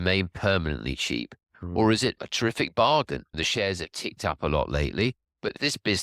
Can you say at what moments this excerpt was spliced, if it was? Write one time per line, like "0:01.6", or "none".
0:03.3